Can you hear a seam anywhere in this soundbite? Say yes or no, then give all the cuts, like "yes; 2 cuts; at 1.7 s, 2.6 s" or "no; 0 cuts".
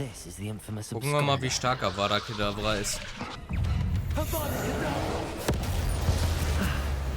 yes; 1 cut; at 3.4 s